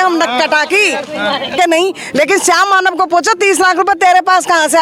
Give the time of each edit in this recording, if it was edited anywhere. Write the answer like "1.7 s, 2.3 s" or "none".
1.5 s